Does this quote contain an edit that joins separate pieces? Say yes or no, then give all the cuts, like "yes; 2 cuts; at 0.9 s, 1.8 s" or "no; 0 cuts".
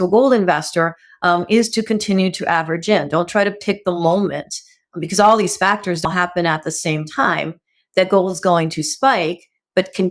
yes; 1 cut; at 6.1 s